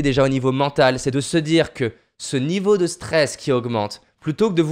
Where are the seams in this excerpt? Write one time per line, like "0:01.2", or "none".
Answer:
0:01.0